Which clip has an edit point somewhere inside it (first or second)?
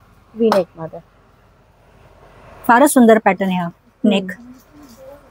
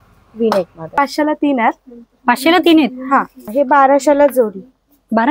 second